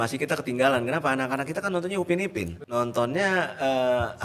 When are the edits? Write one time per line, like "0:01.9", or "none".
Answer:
0:02.6